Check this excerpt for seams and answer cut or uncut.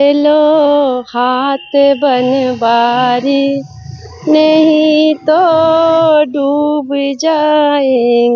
uncut